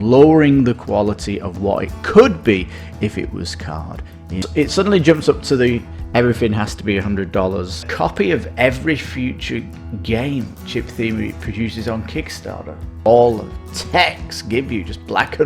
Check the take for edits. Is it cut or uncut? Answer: cut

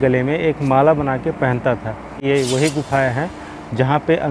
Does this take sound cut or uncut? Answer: cut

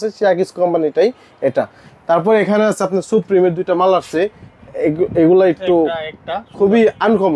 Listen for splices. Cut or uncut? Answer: uncut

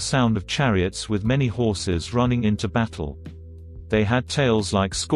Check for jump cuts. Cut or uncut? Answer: uncut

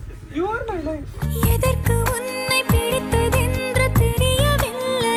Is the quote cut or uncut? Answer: uncut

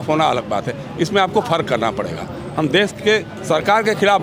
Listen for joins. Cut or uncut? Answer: uncut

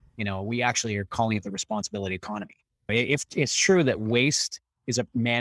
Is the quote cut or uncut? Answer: cut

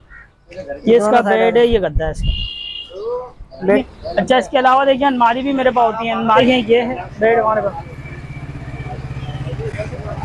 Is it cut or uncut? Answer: cut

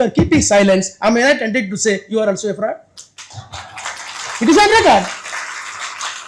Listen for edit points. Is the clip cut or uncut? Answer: uncut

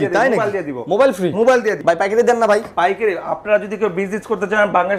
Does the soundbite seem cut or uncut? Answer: cut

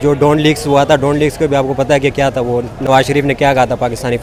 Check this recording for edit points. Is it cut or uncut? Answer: uncut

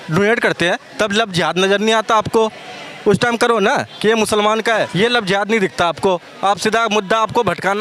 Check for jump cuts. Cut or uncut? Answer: uncut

